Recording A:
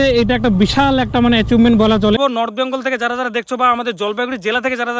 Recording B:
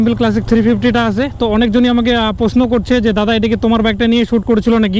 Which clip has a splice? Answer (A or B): A